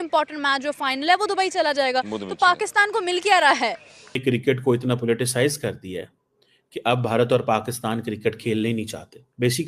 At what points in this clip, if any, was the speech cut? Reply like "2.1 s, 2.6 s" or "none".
4.1 s

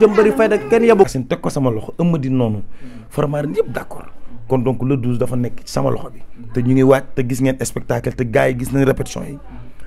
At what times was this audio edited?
1.1 s

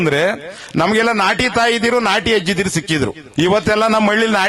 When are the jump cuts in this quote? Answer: 3.2 s

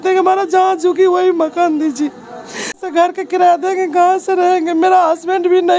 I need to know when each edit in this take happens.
2.8 s

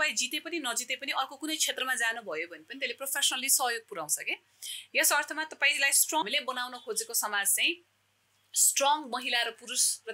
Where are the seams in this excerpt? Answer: 6.2 s

